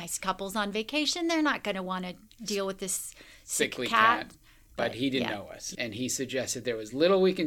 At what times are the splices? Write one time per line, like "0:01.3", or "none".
0:05.6